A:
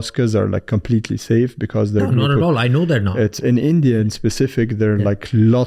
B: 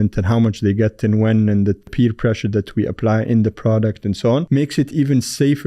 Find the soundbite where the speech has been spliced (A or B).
B